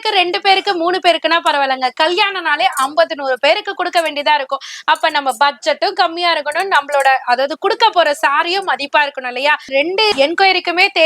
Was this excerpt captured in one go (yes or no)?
no